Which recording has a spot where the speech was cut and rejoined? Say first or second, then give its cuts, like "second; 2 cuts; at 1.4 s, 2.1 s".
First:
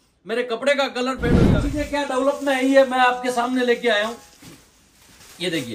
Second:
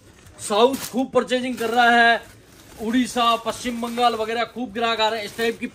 first; 1 cut; at 1.5 s